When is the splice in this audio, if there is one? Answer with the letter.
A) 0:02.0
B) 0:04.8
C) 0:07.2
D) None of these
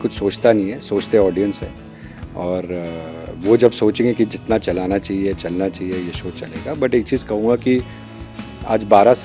D